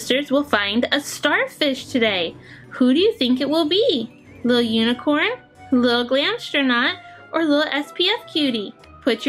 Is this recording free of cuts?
yes; 0 cuts

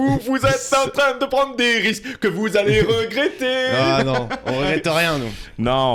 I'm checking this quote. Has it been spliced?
no; 0 cuts

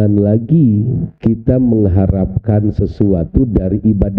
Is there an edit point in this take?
yes; 1 cut; at 1.0 s

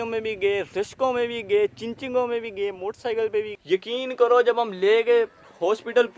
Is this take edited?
yes; 1 cut; at 3.5 s

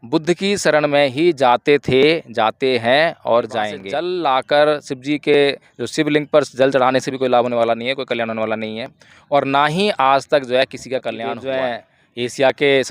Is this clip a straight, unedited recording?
no; 2 cuts; at 3.8 s, 11.4 s

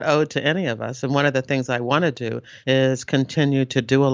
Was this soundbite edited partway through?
no; 0 cuts

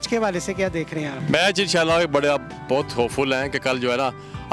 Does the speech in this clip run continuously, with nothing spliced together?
no; 1 cut; at 1.2 s

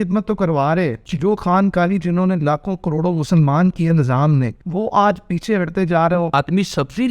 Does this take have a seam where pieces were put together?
yes; 3 cuts; at 1.0 s, 4.6 s, 6.3 s

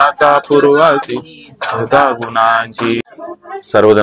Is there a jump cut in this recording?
yes; 1 cut; at 3.0 s

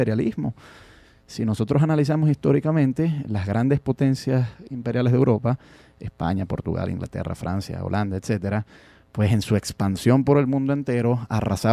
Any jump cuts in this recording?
yes; 1 cut; at 10.0 s

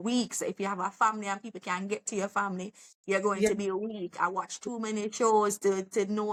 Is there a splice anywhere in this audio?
no; 0 cuts

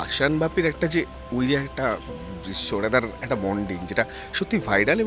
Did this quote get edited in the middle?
no; 0 cuts

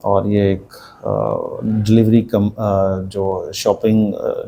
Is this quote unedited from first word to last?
yes; 0 cuts

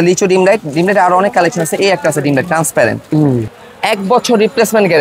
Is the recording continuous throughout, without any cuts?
no; 1 cut; at 3.5 s

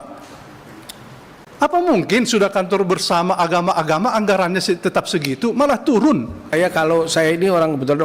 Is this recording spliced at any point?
yes; 1 cut; at 6.5 s

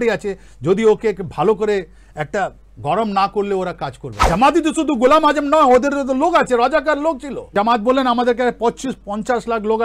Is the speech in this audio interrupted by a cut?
yes; 2 cuts; at 4.1 s, 7.5 s

